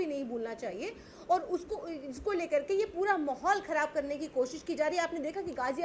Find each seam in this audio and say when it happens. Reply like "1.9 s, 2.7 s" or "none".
none